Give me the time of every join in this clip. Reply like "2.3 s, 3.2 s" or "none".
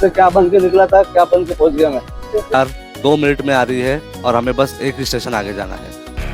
2.5 s